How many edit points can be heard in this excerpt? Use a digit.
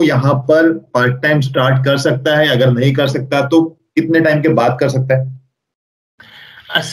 0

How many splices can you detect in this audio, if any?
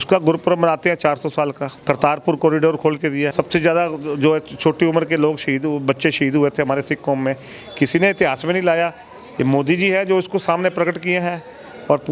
2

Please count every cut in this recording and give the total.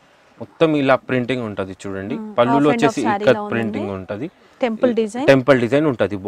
0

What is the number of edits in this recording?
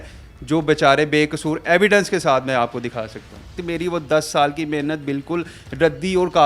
1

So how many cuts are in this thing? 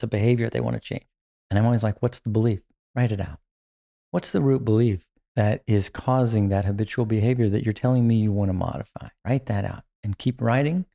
1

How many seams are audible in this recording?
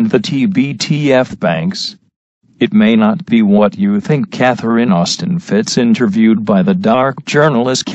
1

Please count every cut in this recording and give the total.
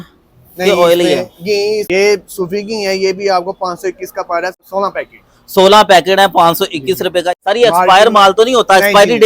3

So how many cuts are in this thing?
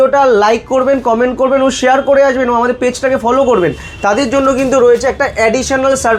0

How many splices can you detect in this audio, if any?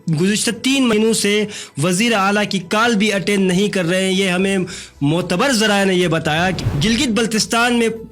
2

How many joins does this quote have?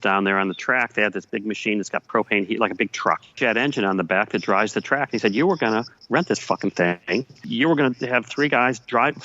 2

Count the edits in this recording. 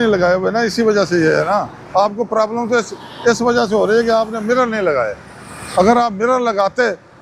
0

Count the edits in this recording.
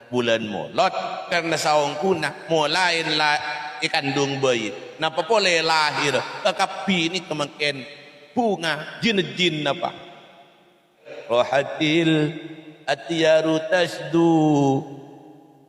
1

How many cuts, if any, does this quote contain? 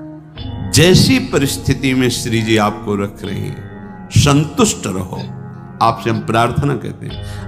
1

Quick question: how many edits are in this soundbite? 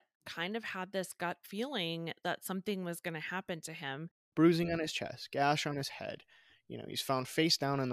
1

